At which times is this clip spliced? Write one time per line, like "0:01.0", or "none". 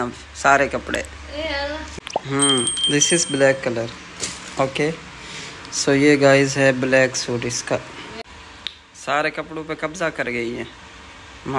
0:02.0
0:08.3